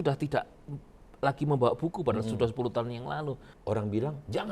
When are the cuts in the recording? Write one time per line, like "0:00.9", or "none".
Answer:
0:03.5